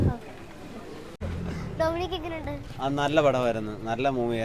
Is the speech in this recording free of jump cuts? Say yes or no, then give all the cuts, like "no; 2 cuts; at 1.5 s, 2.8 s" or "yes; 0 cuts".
no; 1 cut; at 1.1 s